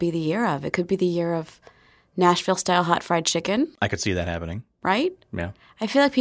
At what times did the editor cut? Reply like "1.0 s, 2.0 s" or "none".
3.7 s